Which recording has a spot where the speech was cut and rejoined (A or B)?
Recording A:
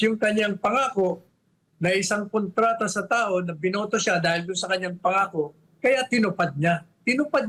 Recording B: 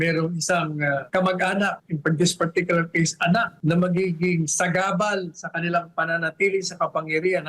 B